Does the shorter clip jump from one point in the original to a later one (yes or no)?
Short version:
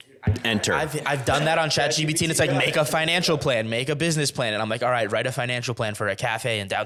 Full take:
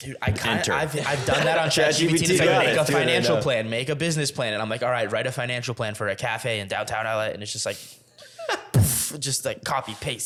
no